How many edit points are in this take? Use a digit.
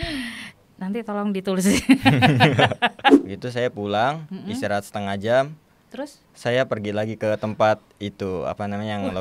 1